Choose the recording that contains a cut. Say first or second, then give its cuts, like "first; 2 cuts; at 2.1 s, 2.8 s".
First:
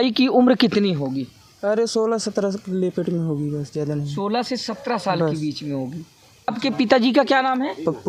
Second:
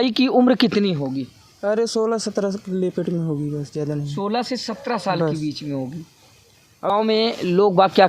second; 1 cut; at 6.4 s